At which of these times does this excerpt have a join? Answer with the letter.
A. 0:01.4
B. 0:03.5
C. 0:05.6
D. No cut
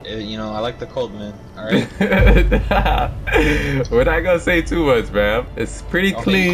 C